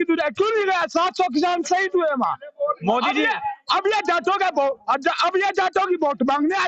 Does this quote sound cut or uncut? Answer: uncut